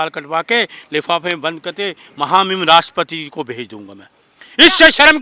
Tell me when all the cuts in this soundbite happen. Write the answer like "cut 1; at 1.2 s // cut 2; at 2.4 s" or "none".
none